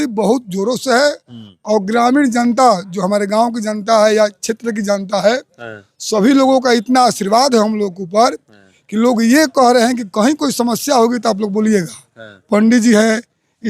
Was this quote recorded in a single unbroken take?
yes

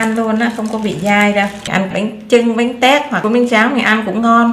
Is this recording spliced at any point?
yes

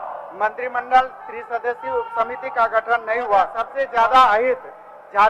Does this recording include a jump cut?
yes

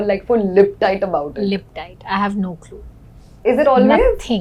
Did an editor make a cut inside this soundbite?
no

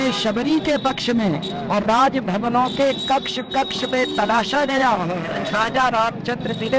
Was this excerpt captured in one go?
yes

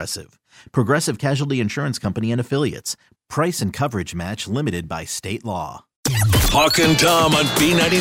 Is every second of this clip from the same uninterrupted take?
no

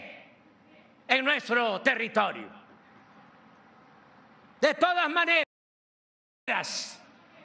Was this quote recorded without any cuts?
yes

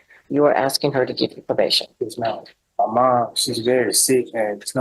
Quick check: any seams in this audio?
yes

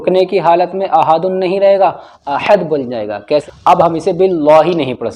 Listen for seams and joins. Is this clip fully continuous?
no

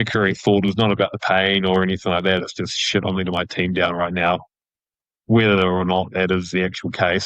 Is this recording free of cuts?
yes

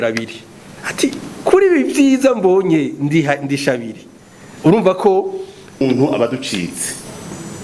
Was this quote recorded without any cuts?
no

